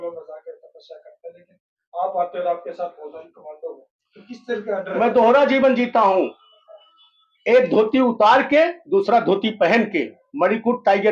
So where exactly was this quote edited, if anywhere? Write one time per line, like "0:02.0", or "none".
none